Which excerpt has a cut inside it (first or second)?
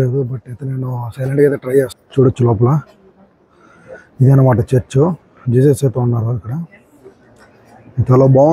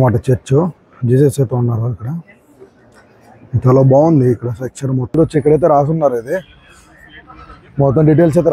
second